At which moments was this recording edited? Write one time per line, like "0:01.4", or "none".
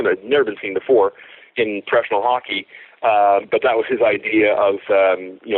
none